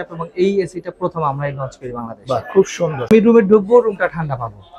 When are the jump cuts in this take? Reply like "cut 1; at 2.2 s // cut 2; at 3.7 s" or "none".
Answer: cut 1; at 3.1 s